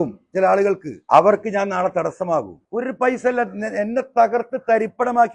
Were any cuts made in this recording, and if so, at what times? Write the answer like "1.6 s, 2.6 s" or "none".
0.9 s, 2.6 s